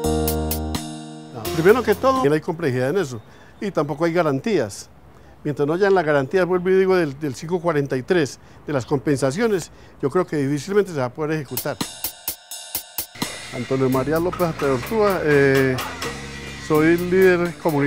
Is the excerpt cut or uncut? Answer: uncut